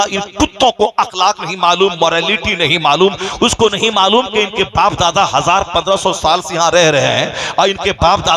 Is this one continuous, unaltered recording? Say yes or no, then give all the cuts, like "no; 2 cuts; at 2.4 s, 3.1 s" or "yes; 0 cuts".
yes; 0 cuts